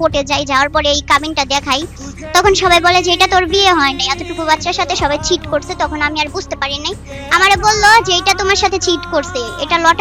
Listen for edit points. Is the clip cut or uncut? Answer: uncut